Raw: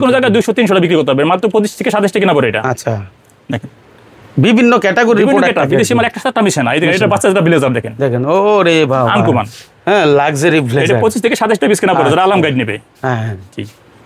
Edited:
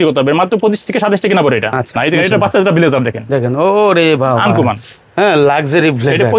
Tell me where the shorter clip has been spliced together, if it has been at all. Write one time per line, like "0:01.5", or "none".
0:01.9